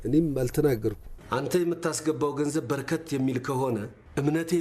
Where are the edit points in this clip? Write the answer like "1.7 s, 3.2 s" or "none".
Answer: 1.1 s